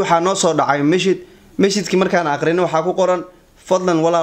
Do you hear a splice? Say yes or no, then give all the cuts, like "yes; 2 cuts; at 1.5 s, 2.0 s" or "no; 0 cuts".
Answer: no; 0 cuts